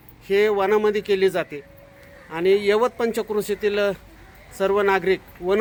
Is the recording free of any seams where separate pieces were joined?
yes; 0 cuts

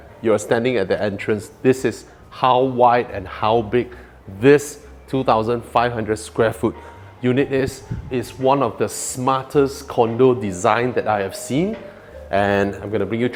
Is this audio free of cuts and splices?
yes; 0 cuts

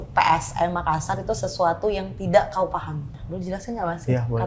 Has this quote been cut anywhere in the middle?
yes; 1 cut; at 3.1 s

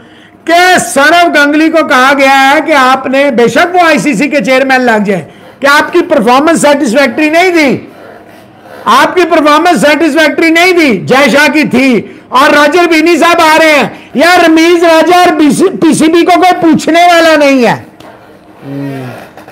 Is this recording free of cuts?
yes; 0 cuts

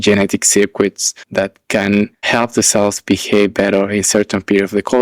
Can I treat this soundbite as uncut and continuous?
no; 1 cut; at 2.2 s

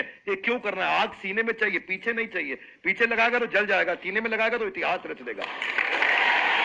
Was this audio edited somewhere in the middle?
no; 0 cuts

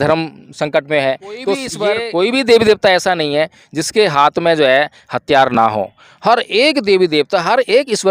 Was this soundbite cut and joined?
yes; 1 cut; at 1.7 s

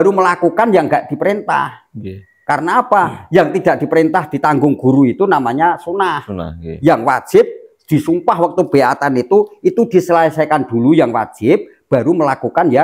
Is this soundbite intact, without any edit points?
yes; 0 cuts

